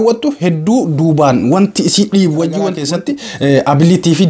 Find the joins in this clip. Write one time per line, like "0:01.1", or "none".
0:02.9